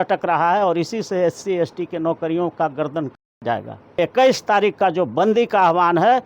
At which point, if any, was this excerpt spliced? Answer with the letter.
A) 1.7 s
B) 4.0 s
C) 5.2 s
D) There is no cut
B